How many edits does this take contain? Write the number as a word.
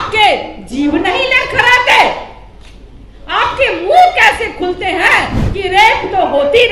one